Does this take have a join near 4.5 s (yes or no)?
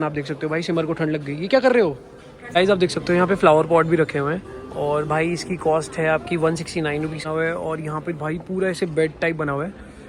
no